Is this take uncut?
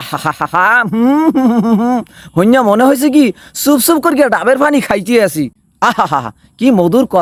yes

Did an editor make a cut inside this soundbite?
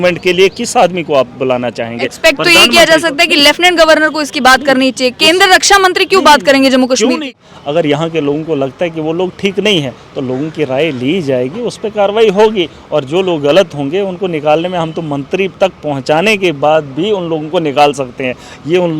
yes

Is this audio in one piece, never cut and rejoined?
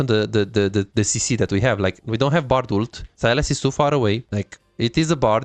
no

